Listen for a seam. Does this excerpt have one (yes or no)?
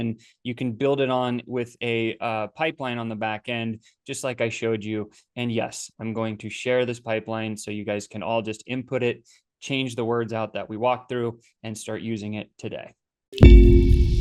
yes